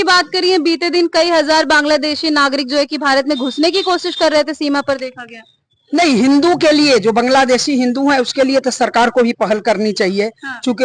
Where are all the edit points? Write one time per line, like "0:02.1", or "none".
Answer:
none